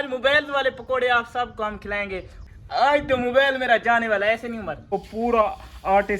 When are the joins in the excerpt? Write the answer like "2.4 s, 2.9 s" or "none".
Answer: 2.4 s, 4.9 s